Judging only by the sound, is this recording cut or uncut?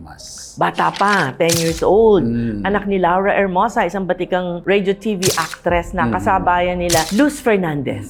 uncut